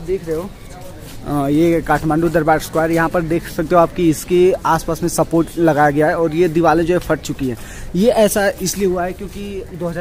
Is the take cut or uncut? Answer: uncut